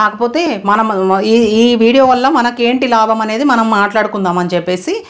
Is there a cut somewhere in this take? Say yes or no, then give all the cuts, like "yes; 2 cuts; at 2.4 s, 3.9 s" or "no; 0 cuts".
no; 0 cuts